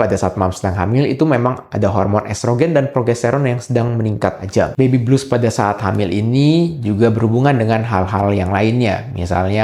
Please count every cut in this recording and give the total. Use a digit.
1